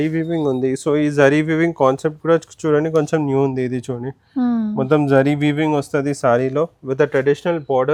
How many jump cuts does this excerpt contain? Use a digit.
0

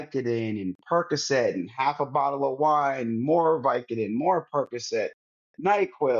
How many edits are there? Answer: 0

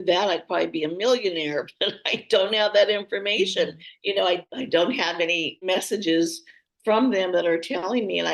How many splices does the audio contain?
2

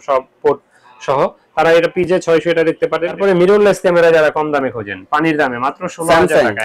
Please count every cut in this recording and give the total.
1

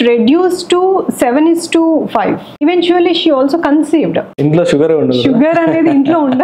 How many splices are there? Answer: 2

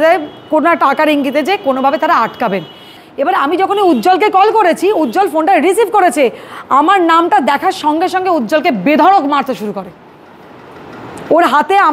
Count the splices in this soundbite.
1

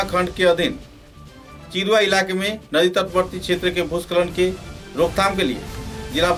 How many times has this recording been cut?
0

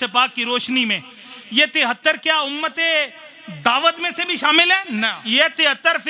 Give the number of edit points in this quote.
1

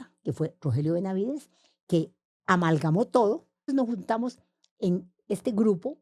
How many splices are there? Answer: 2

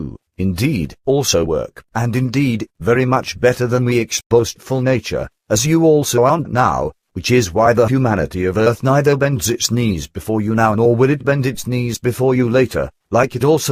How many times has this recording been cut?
0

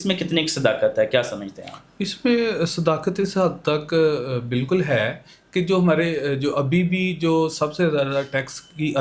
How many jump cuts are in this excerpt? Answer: 0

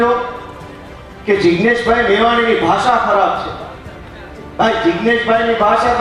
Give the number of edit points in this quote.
0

